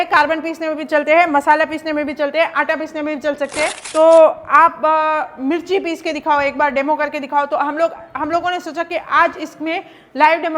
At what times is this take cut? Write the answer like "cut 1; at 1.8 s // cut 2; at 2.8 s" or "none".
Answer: cut 1; at 3.8 s

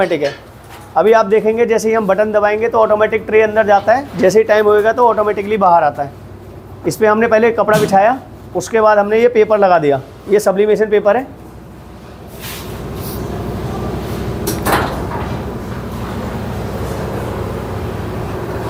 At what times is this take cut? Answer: none

